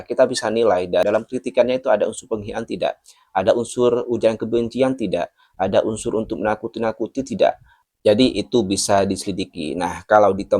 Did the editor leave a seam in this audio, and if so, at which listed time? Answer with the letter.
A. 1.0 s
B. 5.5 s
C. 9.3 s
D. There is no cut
A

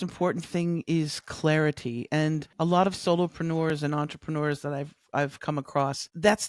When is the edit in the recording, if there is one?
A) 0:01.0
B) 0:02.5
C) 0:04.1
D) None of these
B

